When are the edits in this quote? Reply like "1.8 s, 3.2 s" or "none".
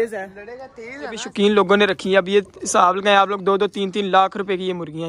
1.2 s